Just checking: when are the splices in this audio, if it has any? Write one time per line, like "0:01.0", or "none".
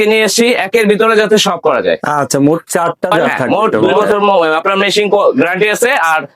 0:03.9